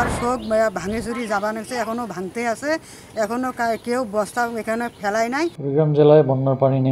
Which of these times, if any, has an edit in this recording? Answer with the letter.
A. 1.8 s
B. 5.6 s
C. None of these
B